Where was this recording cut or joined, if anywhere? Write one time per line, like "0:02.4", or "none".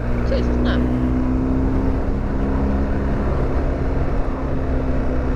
none